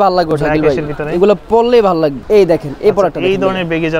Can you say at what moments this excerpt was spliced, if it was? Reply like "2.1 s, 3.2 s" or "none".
2.2 s

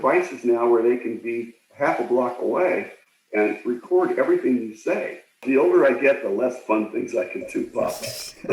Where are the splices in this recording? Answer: 5.4 s

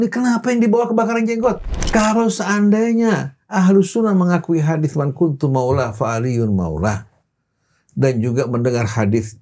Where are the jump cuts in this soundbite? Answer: 1.7 s

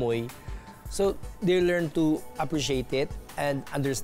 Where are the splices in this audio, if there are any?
none

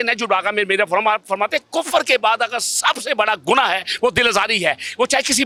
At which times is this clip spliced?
none

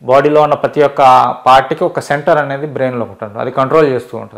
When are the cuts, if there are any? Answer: none

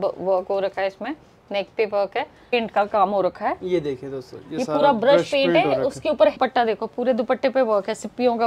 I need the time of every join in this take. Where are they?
2.5 s, 6.4 s

